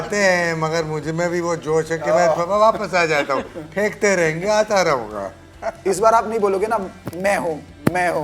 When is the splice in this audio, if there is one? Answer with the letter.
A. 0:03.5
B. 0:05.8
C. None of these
C